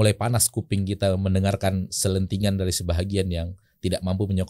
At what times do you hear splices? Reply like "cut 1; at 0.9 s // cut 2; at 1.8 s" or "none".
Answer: none